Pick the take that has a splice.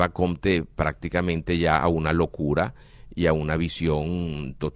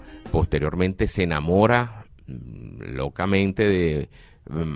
first; 1 cut; at 1.4 s

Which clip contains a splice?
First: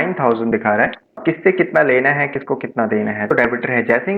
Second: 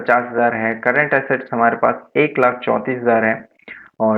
first; 2 cuts; at 1.2 s, 3.3 s

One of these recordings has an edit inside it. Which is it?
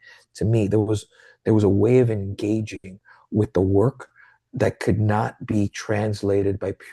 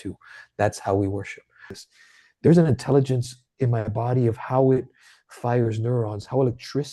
second; 1 cut; at 1.7 s

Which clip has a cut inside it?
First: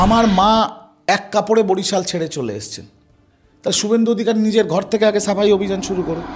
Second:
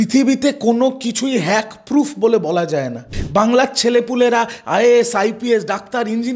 second; 1 cut; at 3.2 s

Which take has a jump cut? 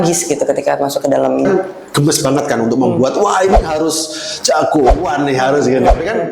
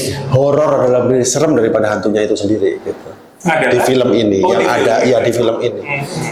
first; 1 cut; at 1.5 s

